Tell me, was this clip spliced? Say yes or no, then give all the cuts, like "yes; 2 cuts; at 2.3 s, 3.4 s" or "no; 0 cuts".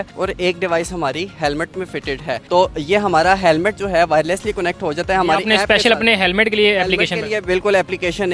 no; 0 cuts